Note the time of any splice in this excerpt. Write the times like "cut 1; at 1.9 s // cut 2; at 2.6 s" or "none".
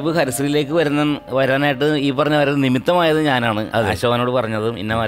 none